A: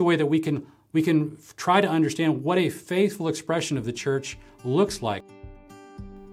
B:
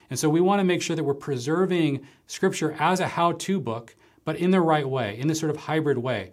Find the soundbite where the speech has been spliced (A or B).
A